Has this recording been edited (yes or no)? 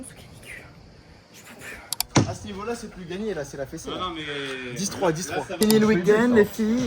yes